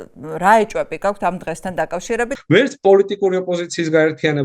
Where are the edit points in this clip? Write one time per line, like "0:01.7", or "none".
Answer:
0:02.3